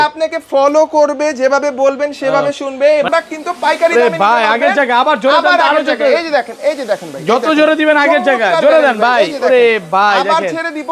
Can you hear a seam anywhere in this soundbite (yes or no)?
yes